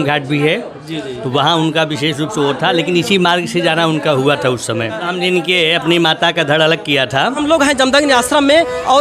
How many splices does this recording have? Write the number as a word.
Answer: two